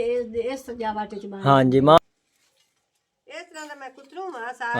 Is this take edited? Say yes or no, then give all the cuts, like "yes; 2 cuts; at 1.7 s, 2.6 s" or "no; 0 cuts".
yes; 1 cut; at 2.0 s